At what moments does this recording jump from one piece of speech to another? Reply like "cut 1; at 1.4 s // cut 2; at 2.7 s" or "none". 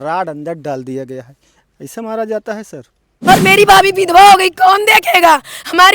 cut 1; at 3.3 s